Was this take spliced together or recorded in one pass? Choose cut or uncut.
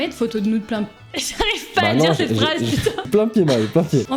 uncut